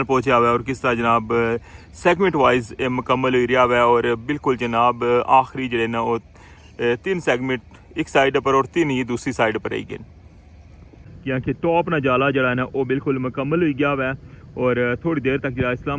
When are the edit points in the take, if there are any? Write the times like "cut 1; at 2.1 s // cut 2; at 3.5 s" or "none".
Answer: cut 1; at 11.1 s